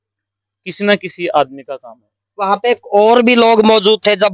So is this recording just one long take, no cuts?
yes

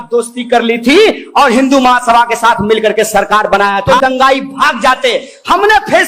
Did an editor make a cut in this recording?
yes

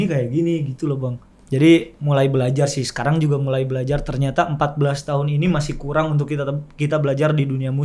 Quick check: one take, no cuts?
yes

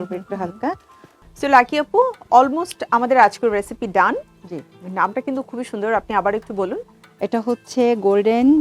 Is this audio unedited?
no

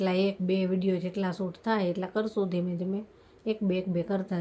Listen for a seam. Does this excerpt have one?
no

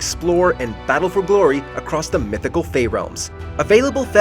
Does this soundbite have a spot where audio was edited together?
no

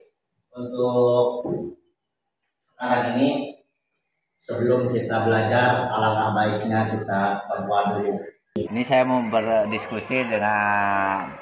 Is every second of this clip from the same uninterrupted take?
no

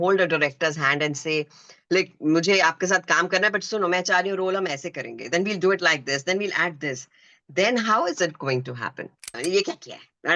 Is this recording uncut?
no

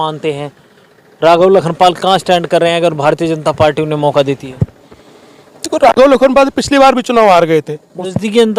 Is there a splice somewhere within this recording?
no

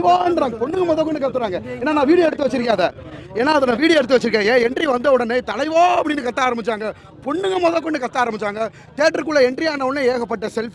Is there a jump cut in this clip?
no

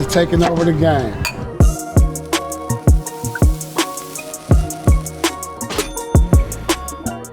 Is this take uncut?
yes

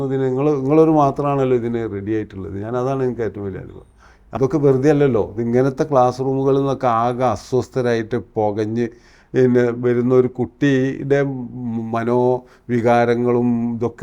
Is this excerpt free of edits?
no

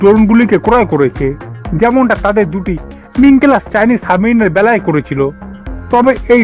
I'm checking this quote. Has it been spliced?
no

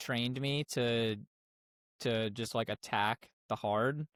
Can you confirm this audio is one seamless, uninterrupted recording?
yes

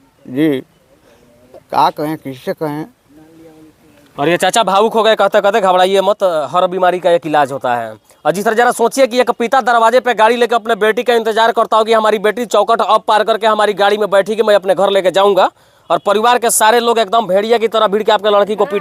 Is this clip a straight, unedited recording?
yes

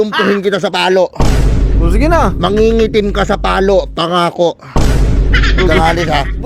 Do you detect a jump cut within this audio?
no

